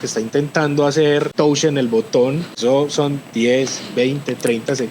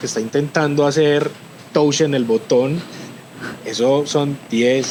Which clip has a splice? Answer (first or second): first